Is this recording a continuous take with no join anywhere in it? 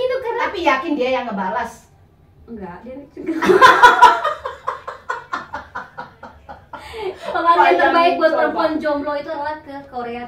yes; 0 cuts

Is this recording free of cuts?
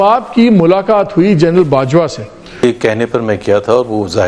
no; 1 cut; at 2.6 s

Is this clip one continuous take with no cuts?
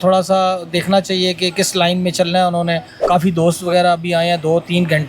no; 1 cut; at 2.9 s

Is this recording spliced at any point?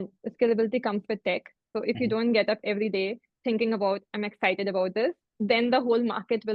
yes; 1 cut; at 1.6 s

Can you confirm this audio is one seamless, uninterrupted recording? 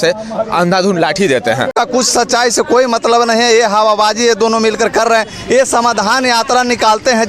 no; 1 cut; at 1.7 s

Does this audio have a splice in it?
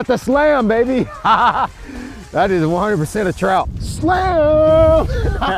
yes; 1 cut; at 3.8 s

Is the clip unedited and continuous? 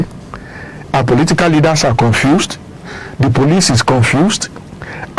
yes; 0 cuts

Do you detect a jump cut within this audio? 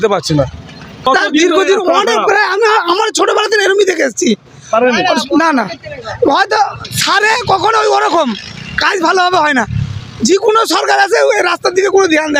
no; 0 cuts

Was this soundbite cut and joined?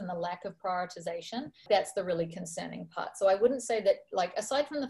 yes; 1 cut; at 1.6 s

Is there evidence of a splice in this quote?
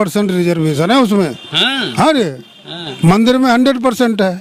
no; 0 cuts

